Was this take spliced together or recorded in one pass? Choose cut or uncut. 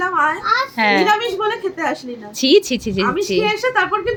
uncut